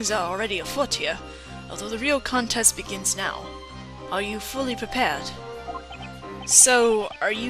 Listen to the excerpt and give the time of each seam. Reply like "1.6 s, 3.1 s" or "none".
4.5 s